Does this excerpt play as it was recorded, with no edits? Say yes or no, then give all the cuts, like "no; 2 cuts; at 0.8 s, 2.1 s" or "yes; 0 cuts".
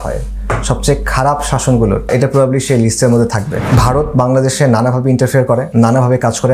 no; 3 cuts; at 2.1 s, 3.6 s, 5.7 s